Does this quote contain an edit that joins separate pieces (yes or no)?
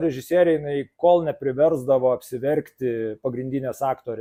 no